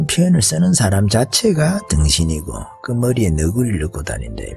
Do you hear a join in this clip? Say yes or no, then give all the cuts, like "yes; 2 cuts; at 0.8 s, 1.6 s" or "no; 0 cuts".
no; 0 cuts